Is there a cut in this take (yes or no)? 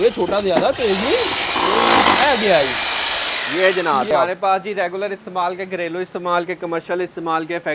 yes